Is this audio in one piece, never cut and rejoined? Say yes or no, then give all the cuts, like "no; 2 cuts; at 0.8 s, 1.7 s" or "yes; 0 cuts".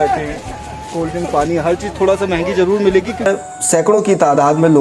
no; 1 cut; at 3.3 s